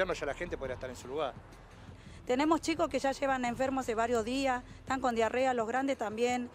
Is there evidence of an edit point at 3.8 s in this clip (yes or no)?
no